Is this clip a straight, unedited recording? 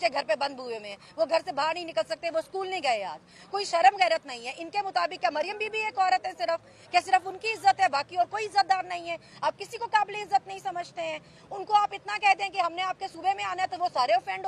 yes; 0 cuts

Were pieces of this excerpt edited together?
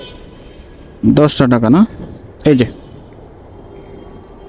no; 0 cuts

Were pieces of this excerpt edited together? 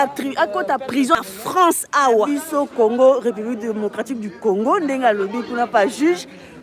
yes; 1 cut; at 2.4 s

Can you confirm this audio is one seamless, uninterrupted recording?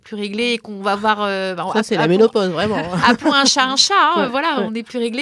yes; 0 cuts

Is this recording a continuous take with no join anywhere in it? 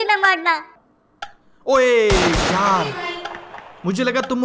yes; 0 cuts

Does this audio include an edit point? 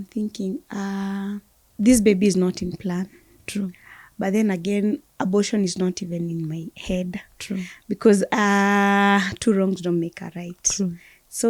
yes; 1 cut; at 1.6 s

